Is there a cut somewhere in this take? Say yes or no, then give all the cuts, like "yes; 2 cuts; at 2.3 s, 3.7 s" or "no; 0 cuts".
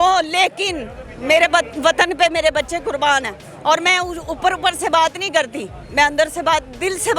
no; 0 cuts